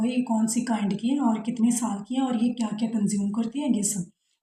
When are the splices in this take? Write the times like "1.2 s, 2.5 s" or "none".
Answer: none